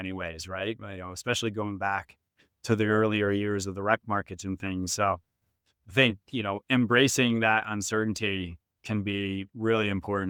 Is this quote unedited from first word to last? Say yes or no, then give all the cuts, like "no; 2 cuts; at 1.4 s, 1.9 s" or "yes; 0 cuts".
yes; 0 cuts